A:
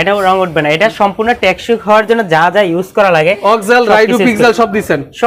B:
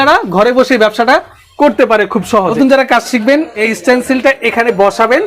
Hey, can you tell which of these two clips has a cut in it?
B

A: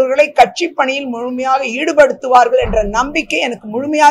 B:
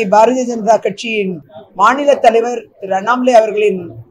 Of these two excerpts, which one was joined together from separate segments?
B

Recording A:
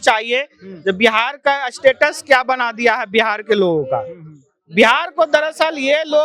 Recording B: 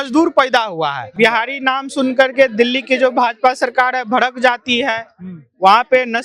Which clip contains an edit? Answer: B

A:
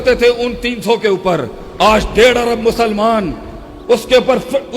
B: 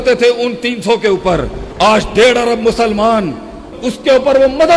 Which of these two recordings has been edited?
B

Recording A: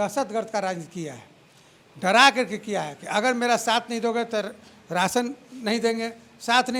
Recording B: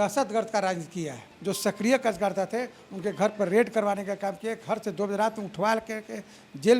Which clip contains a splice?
B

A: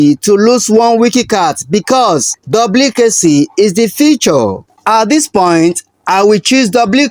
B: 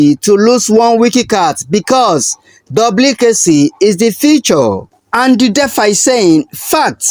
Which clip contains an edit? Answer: A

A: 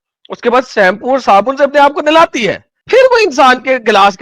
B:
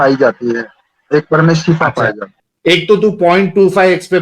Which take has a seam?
B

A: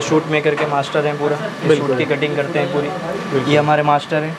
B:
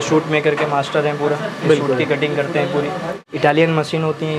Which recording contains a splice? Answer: B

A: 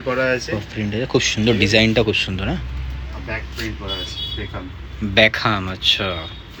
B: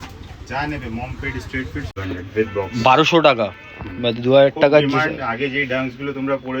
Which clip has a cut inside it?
B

